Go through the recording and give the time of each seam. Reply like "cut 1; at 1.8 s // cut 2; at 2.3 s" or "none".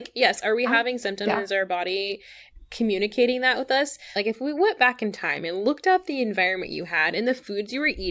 cut 1; at 4.2 s